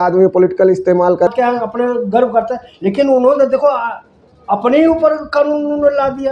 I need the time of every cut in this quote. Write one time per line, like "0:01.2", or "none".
0:01.3